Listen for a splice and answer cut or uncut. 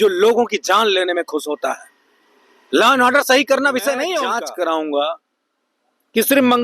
cut